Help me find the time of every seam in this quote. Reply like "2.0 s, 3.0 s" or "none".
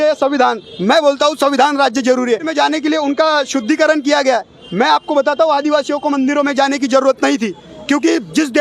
2.5 s